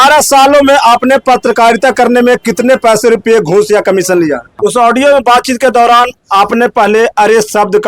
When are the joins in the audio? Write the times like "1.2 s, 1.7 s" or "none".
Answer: 4.5 s